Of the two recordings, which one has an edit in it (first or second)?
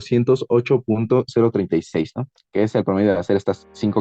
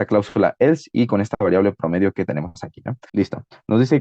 second